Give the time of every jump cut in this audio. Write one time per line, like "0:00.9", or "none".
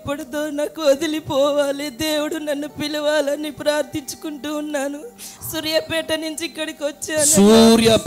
none